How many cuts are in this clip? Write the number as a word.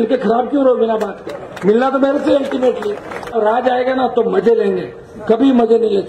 one